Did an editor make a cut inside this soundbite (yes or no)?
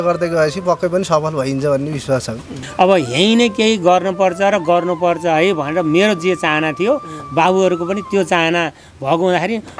yes